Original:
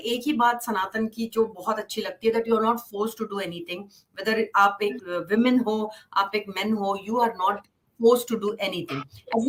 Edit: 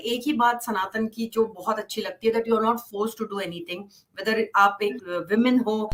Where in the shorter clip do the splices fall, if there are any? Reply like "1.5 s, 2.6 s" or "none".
none